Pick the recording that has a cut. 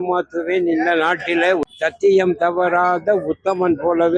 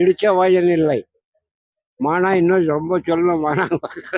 first; 1 cut; at 1.6 s

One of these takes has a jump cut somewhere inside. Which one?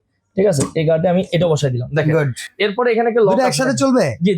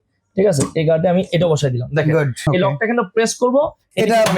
second; 1 cut; at 2.4 s

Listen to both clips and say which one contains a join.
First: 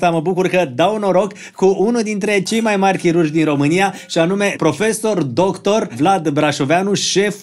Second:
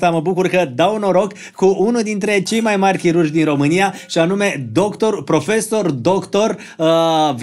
first; 2 cuts; at 4.6 s, 5.9 s

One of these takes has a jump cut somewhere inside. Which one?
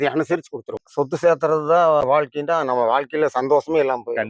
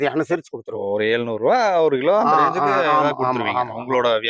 first; 2 cuts; at 0.9 s, 2.2 s

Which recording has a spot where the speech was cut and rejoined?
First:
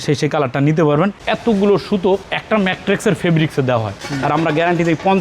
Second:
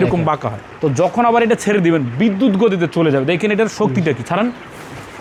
first; 2 cuts; at 1.2 s, 3.9 s

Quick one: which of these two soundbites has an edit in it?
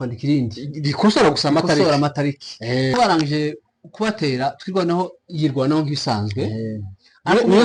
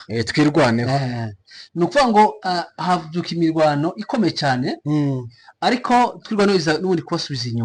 first; 1 cut; at 2.9 s

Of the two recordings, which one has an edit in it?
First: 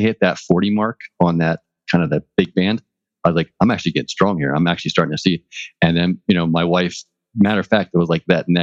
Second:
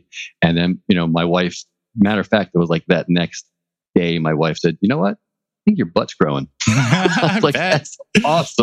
first; 2 cuts; at 1.6 s, 3.5 s

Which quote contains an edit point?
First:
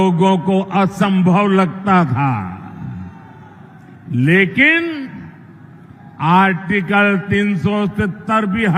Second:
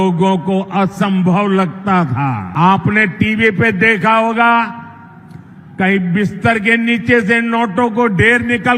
second; 1 cut; at 2.4 s

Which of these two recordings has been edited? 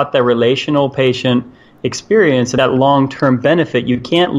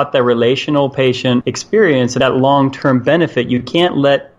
second; 1 cut; at 1.6 s

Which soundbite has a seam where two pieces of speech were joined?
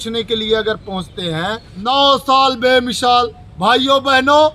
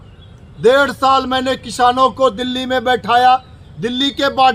first; 1 cut; at 1.7 s

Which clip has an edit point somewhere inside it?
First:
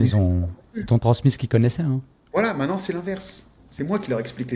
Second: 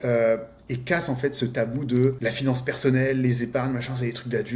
second; 1 cut; at 2.2 s

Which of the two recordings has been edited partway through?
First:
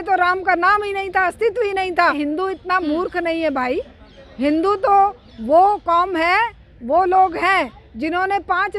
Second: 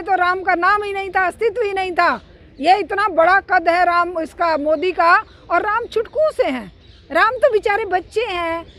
first; 1 cut; at 2.1 s

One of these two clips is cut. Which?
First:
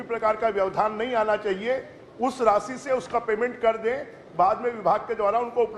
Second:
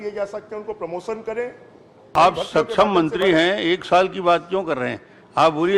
second; 1 cut; at 2.2 s

